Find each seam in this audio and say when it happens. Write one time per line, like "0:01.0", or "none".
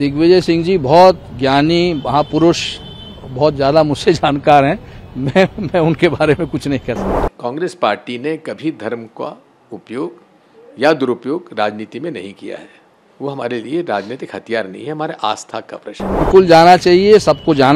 0:07.1
0:16.1